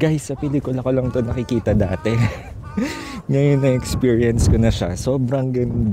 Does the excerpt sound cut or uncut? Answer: uncut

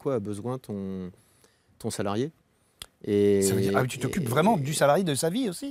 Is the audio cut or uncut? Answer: uncut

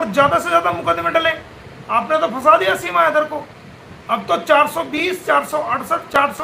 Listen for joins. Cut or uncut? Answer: uncut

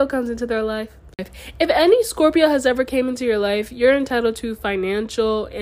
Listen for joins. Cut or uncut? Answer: cut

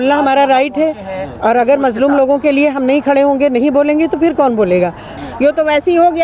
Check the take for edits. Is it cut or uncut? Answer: cut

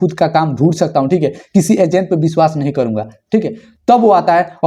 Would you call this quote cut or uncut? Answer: uncut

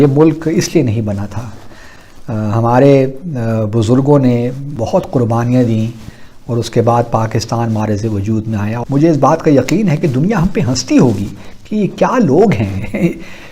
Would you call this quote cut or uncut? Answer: cut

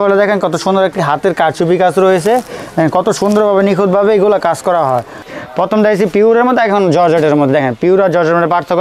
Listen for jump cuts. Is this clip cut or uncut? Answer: cut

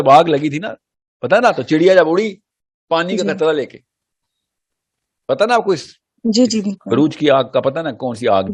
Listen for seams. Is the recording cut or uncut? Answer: uncut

